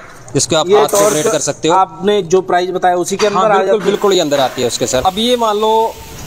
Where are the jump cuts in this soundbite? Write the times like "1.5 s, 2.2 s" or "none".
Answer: 4.9 s